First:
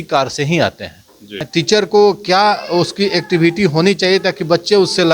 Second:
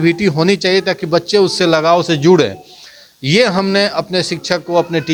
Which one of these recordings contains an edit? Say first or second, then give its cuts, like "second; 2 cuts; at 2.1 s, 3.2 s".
first; 1 cut; at 1.4 s